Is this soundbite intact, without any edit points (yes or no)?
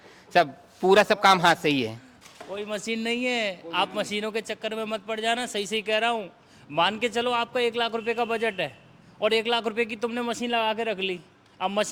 yes